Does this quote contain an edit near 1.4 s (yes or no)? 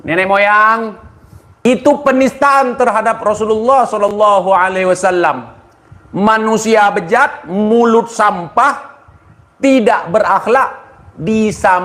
yes